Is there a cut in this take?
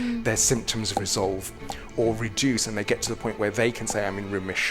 no; 0 cuts

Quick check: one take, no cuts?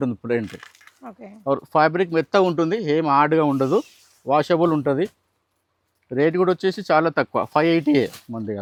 yes; 0 cuts

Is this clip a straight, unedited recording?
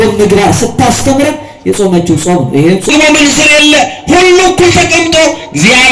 no; 1 cut; at 2.9 s

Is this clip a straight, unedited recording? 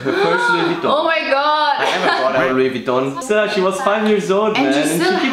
no; 1 cut; at 3.2 s

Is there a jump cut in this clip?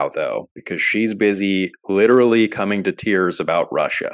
no; 0 cuts

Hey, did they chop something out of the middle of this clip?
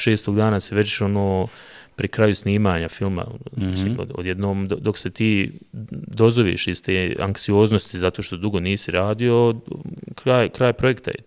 no; 0 cuts

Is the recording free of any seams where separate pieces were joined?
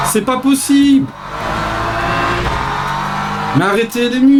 yes; 0 cuts

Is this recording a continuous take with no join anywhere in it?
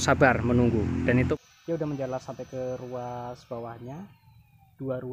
no; 1 cut; at 1.3 s

